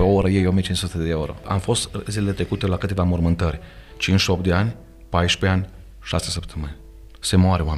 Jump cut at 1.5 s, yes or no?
yes